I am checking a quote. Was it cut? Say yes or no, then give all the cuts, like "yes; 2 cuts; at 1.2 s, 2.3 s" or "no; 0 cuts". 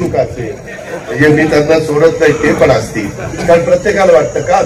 no; 0 cuts